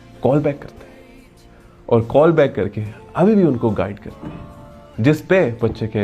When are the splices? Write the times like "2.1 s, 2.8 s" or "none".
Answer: none